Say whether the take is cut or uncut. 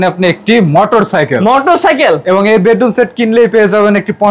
uncut